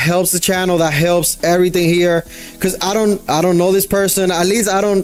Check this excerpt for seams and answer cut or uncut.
uncut